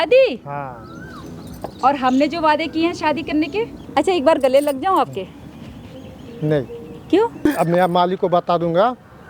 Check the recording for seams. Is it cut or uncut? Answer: cut